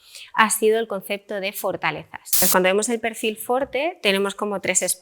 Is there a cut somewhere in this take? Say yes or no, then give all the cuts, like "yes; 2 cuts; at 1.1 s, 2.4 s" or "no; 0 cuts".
yes; 1 cut; at 2.4 s